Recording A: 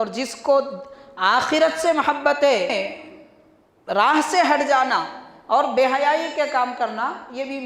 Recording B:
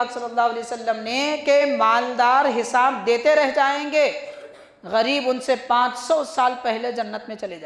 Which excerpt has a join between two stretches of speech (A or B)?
A